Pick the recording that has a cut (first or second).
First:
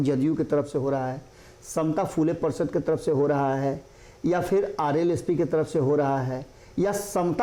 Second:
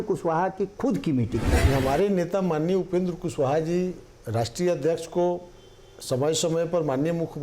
second